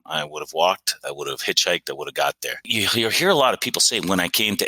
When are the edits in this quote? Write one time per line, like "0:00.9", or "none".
0:02.6